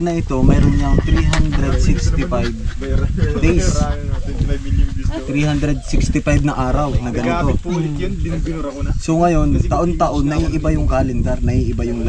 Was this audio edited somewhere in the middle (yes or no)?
no